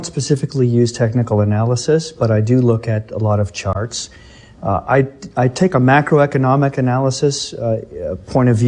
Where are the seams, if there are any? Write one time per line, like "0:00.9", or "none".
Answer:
0:05.2